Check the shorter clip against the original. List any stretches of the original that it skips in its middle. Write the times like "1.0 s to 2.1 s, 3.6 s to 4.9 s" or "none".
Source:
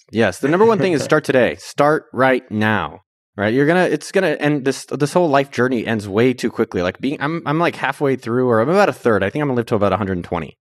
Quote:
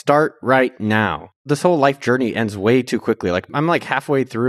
3.1 s to 4.9 s, 7.0 s to 7.4 s